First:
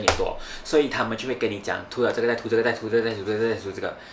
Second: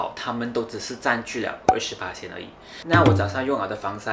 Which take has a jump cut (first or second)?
second